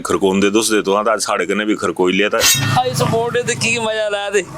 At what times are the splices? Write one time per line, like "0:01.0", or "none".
0:02.5